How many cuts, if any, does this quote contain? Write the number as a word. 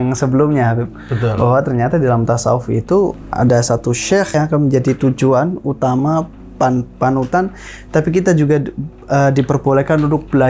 two